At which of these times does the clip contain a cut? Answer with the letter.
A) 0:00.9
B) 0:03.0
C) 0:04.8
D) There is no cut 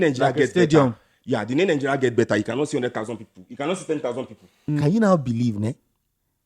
C